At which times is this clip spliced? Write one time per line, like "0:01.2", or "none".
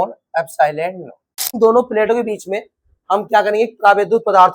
0:01.6